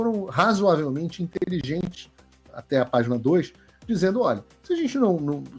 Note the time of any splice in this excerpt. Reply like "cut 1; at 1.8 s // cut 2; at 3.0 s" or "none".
none